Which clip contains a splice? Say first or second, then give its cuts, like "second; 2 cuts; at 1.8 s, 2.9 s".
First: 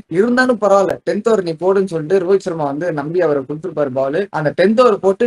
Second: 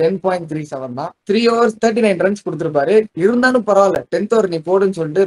second; 1 cut; at 1.2 s